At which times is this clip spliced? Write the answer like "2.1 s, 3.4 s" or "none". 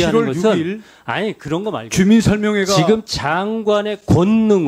none